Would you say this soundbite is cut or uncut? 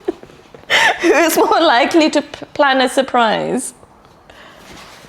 uncut